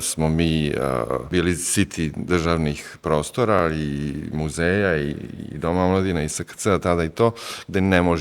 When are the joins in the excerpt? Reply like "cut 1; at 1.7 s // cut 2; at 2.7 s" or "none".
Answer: cut 1; at 1.3 s